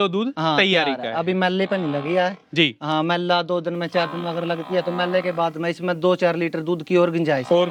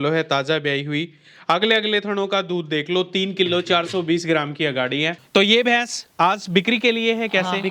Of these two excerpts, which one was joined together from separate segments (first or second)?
second